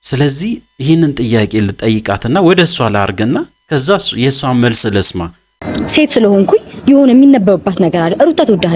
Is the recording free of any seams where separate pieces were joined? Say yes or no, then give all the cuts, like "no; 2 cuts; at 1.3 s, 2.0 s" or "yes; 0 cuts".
no; 1 cut; at 5.6 s